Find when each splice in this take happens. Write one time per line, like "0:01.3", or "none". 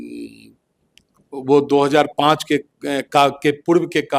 none